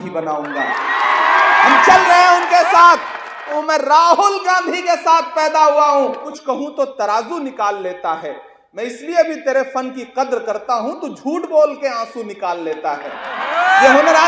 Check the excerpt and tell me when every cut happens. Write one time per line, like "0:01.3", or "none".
0:03.6
0:06.3

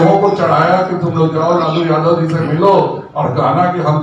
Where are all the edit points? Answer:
none

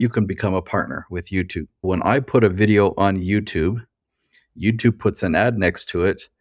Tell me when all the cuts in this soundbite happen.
0:01.8

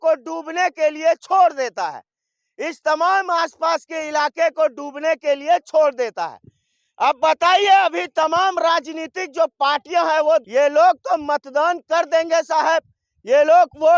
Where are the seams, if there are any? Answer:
0:10.4

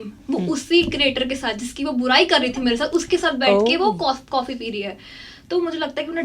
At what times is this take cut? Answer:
none

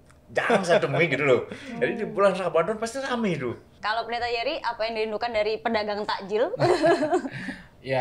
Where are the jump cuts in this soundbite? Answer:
0:03.7

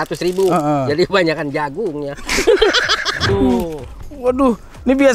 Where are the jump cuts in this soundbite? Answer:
0:03.3

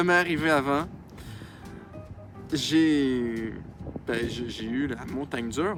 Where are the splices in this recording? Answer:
none

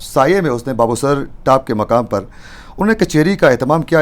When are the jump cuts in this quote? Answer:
none

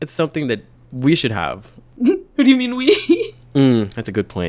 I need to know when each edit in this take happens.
0:02.0

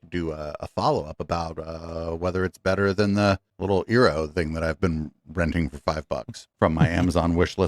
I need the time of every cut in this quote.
0:06.5

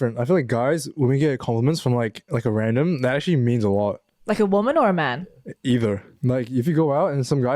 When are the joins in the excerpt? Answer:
0:06.1

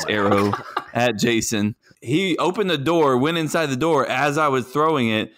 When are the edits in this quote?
0:01.9

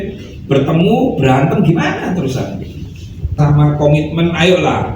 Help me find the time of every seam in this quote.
0:03.4

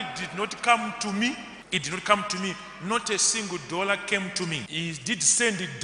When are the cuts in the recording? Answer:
0:01.5
0:04.7

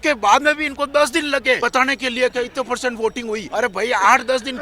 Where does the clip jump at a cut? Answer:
0:01.6
0:03.5

